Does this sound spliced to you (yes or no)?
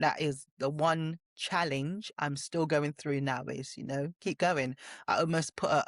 no